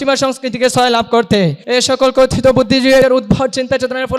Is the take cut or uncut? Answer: cut